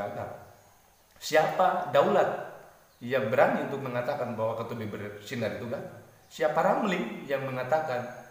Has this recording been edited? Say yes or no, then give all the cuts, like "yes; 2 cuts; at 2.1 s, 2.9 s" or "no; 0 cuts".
no; 0 cuts